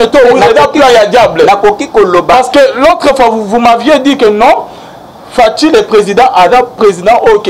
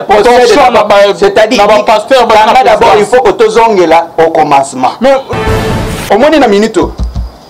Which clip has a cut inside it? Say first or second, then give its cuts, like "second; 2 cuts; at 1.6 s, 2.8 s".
second; 1 cut; at 6.1 s